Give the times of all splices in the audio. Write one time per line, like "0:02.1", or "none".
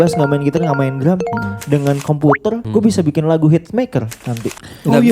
0:02.6